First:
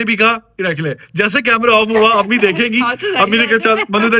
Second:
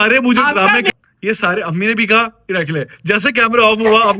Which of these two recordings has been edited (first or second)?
second